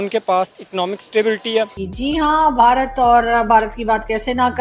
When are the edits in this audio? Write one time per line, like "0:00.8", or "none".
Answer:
0:01.8